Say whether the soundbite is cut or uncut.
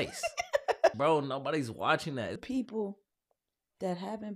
cut